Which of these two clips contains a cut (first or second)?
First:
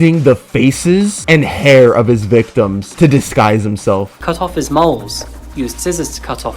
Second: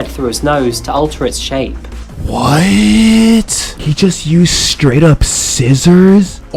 first